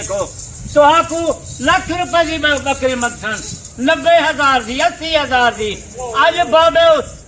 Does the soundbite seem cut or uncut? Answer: uncut